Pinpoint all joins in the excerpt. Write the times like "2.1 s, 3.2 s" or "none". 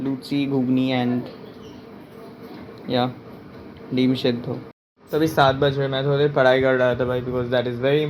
4.9 s